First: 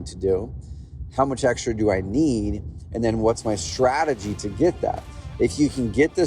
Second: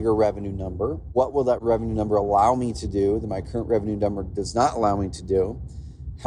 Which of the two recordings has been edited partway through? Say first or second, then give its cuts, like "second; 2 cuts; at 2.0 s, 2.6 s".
second; 1 cut; at 1.5 s